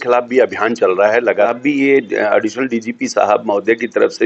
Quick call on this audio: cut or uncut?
cut